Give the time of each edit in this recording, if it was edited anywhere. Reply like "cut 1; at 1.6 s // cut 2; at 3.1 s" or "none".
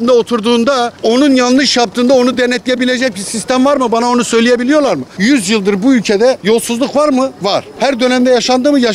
cut 1; at 0.9 s // cut 2; at 5.1 s // cut 3; at 6.4 s // cut 4; at 7.4 s